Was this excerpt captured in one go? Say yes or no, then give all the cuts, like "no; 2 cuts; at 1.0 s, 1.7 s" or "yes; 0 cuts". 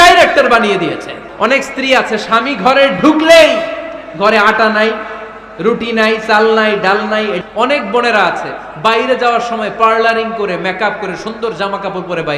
no; 2 cuts; at 1.2 s, 7.4 s